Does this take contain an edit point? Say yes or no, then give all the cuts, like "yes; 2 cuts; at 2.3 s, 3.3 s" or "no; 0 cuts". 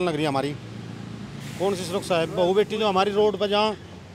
no; 0 cuts